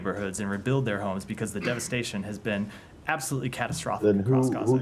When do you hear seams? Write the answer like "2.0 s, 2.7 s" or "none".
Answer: none